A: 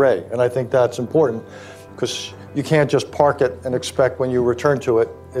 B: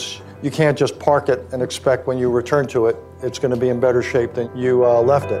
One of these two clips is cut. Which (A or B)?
B